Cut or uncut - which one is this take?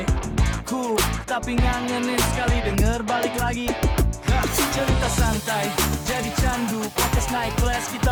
uncut